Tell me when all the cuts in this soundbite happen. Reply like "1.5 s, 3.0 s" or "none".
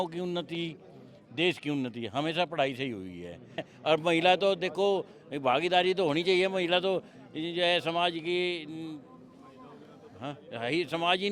3.7 s